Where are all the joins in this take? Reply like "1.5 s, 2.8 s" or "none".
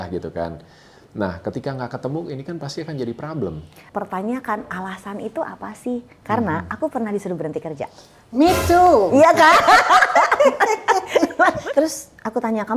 3.9 s, 11.6 s